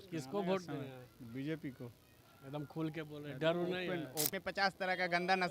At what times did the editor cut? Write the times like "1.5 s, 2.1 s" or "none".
4.4 s